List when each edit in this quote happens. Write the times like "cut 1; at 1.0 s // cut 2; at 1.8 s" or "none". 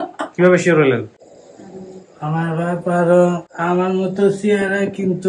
cut 1; at 3.5 s